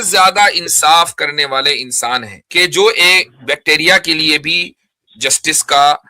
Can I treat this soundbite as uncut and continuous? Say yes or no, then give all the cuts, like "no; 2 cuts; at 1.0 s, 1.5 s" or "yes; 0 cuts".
no; 1 cut; at 2.4 s